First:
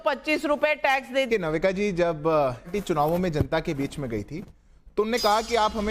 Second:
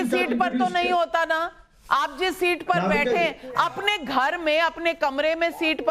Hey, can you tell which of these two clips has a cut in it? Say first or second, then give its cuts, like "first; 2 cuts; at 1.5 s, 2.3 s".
first; 2 cuts; at 1.3 s, 2.7 s